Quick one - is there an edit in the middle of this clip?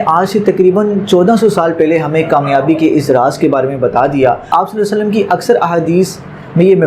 no; 0 cuts

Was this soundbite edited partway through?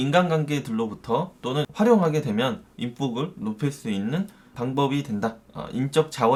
no; 0 cuts

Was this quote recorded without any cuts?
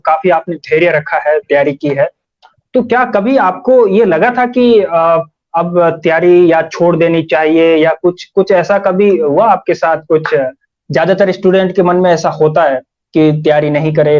yes; 0 cuts

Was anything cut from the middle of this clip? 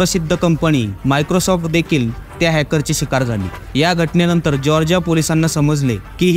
no; 0 cuts

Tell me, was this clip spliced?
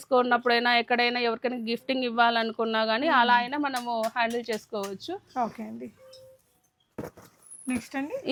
no; 0 cuts

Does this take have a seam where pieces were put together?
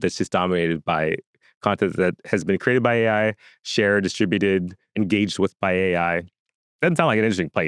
no; 0 cuts

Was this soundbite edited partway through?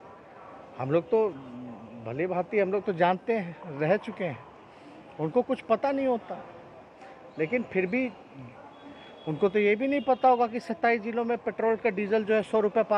no; 0 cuts

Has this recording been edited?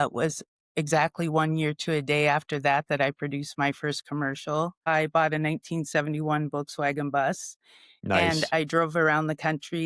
yes; 1 cut; at 4.9 s

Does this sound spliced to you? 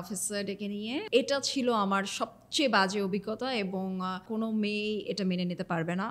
yes; 2 cuts; at 1.1 s, 4.2 s

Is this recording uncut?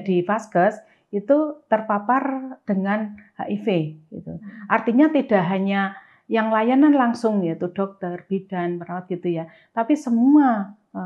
yes; 0 cuts

